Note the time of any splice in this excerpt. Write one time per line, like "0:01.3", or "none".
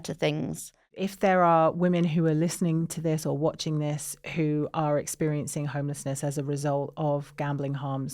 0:01.0